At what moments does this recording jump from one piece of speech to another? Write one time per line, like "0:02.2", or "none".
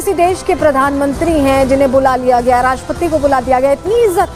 none

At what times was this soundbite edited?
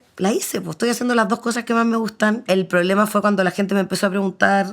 0:02.4

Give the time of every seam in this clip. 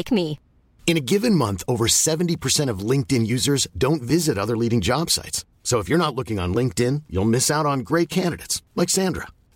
none

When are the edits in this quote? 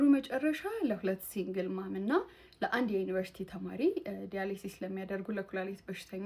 none

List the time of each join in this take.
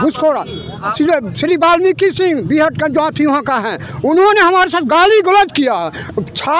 0:00.9

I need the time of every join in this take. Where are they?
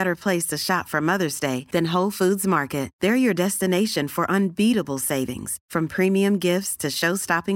none

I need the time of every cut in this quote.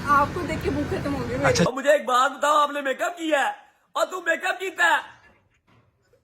0:01.5

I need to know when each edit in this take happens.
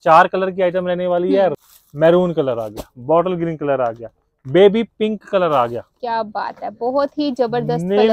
0:01.5

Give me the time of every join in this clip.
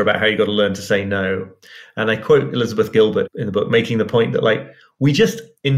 0:03.3

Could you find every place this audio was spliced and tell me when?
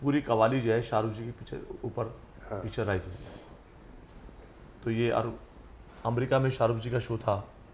none

